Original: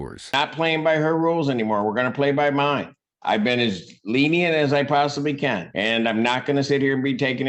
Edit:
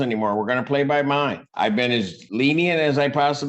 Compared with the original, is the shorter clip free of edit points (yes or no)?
no